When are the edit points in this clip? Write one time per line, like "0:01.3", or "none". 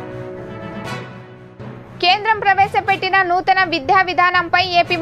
0:01.7